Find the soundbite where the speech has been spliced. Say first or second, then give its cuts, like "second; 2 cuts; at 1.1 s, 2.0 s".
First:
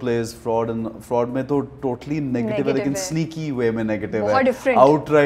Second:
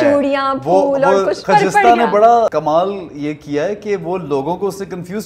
second; 2 cuts; at 1.4 s, 2.5 s